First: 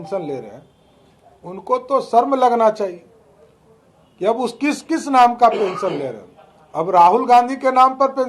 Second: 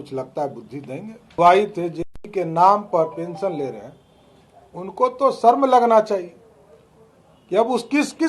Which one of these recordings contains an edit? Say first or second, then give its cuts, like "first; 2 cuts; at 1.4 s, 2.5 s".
second; 1 cut; at 1.3 s